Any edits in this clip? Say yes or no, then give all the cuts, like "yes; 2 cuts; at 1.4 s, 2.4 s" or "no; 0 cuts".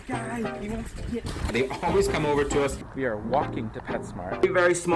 no; 0 cuts